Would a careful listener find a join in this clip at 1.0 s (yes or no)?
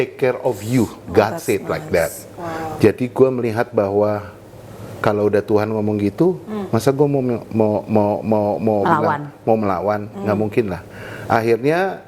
no